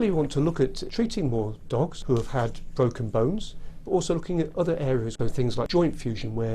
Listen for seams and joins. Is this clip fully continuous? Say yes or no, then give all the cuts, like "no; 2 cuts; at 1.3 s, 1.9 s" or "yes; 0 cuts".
no; 3 cuts; at 0.8 s, 2.0 s, 5.3 s